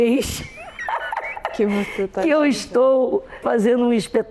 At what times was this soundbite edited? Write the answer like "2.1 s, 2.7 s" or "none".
3.4 s